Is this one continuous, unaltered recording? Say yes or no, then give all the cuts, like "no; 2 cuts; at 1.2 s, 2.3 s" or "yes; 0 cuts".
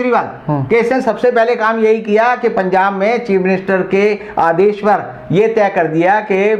yes; 0 cuts